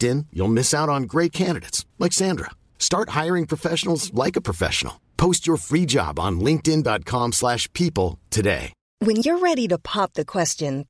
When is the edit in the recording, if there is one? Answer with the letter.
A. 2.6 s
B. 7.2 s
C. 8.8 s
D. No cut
C